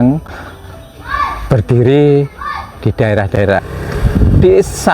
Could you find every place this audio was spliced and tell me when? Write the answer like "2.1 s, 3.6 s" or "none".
3.6 s